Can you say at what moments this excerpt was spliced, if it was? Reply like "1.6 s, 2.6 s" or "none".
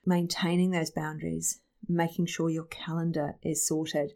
none